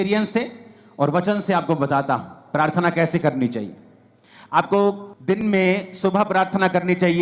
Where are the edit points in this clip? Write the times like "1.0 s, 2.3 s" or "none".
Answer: 5.4 s